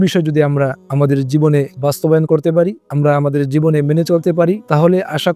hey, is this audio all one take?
yes; 0 cuts

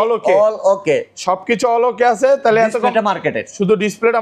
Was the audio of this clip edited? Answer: no; 0 cuts

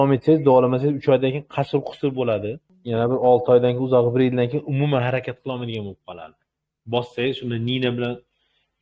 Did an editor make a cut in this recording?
yes; 1 cut; at 2.7 s

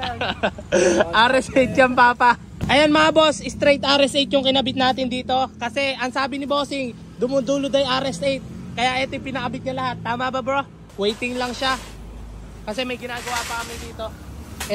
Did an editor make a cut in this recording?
yes; 2 cuts; at 2.5 s, 10.8 s

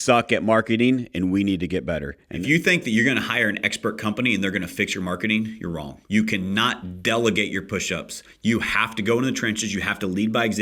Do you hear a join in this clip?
yes; 2 cuts; at 2.4 s, 5.9 s

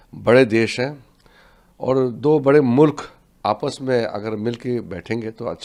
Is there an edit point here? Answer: no; 0 cuts

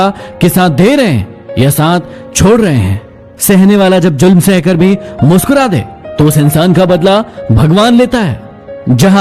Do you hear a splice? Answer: no; 0 cuts

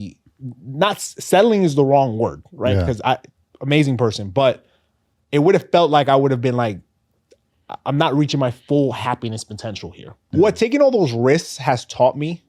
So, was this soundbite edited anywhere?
yes; 1 cut; at 10.1 s

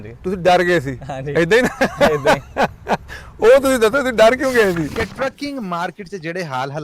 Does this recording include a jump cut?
yes; 1 cut; at 4.9 s

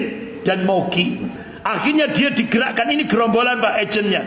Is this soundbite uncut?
no; 1 cut; at 1.4 s

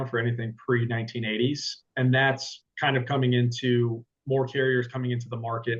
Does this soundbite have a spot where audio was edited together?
yes; 1 cut; at 1.9 s

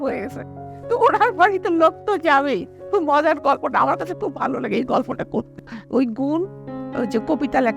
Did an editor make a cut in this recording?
yes; 1 cut; at 5.5 s

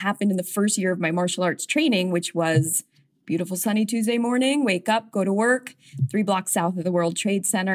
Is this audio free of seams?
yes; 0 cuts

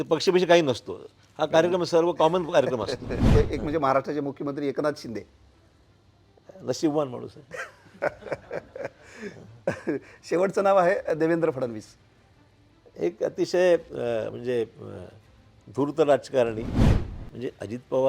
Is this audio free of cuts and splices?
no; 2 cuts; at 3.3 s, 16.8 s

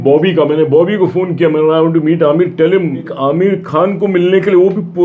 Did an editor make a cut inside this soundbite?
yes; 1 cut; at 3.1 s

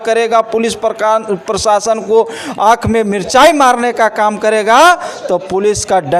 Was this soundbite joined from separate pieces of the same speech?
no; 0 cuts

